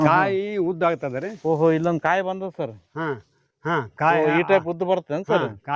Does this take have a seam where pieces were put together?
no; 0 cuts

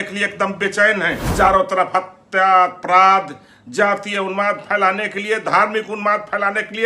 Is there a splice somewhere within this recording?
yes; 1 cut; at 1.2 s

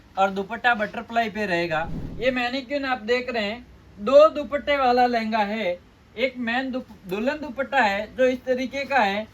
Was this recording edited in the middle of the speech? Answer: yes; 1 cut; at 2.0 s

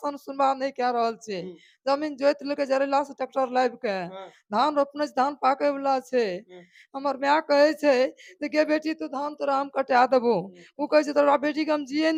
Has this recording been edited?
no; 0 cuts

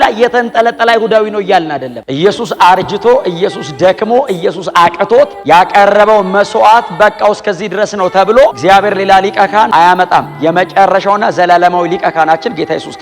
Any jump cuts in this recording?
yes; 1 cut; at 1.9 s

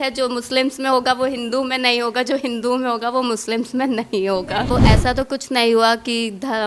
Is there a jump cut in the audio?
yes; 1 cut; at 4.7 s

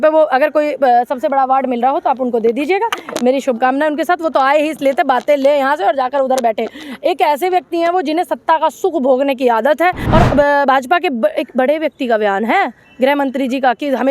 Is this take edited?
yes; 1 cut; at 10.0 s

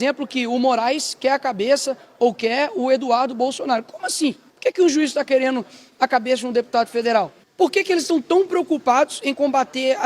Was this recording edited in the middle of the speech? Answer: yes; 2 cuts; at 4.5 s, 7.4 s

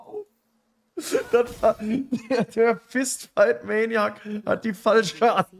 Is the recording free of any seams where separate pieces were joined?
yes; 0 cuts

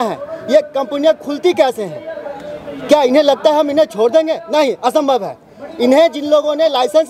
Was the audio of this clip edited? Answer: no; 0 cuts

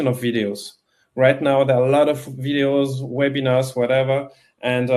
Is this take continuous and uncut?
yes; 0 cuts

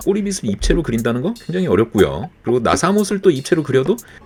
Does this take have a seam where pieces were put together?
no; 0 cuts

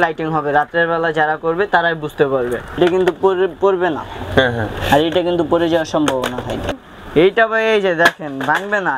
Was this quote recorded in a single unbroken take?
no; 2 cuts; at 2.8 s, 6.8 s

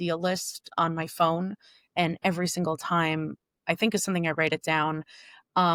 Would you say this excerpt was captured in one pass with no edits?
yes; 0 cuts

